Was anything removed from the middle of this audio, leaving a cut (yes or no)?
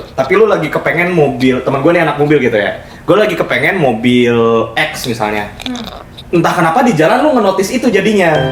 no